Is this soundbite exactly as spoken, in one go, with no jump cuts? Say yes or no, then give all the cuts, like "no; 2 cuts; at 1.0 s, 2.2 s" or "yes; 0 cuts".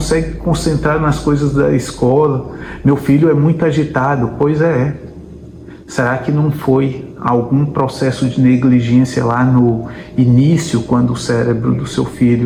yes; 0 cuts